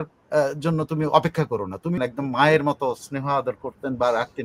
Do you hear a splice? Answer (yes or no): yes